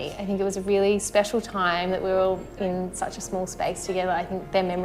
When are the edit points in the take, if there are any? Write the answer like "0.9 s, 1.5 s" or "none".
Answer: none